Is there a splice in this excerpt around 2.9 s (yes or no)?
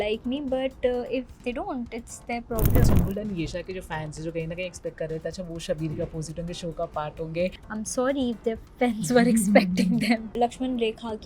yes